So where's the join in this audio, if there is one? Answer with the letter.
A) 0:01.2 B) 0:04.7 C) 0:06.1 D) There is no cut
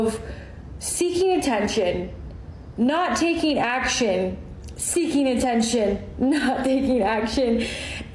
C